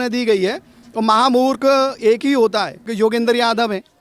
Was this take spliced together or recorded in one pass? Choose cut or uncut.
cut